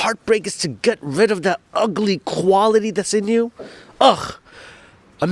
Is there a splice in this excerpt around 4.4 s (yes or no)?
no